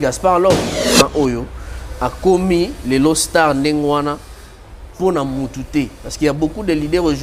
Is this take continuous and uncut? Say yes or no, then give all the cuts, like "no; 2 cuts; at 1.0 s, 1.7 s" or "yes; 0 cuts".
no; 1 cut; at 1.0 s